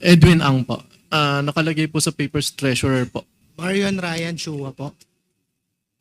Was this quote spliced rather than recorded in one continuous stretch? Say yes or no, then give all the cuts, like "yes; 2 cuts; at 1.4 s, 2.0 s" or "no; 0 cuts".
yes; 2 cuts; at 1.2 s, 3.5 s